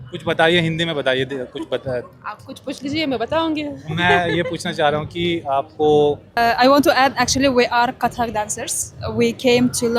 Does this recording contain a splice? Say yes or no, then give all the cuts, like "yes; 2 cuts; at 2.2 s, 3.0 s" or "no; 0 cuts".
yes; 1 cut; at 6.4 s